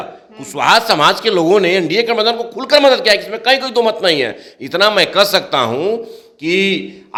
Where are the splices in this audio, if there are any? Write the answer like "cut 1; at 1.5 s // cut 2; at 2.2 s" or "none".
none